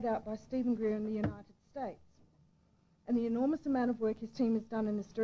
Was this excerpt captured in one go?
yes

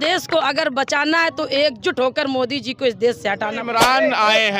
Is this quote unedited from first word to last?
no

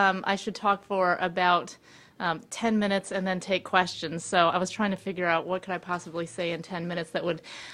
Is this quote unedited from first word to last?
yes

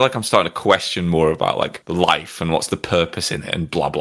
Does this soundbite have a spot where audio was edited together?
no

